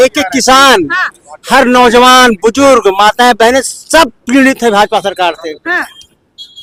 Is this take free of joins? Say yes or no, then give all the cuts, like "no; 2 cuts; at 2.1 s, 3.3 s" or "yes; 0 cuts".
yes; 0 cuts